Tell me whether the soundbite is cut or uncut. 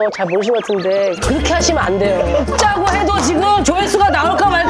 uncut